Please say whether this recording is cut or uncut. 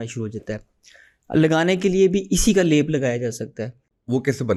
uncut